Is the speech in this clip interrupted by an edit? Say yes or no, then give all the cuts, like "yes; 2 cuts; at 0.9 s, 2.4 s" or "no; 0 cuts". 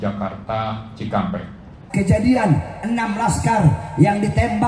yes; 1 cut; at 1.8 s